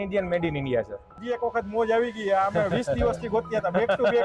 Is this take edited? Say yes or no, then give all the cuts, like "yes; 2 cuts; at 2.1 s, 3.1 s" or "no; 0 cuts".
yes; 1 cut; at 1.2 s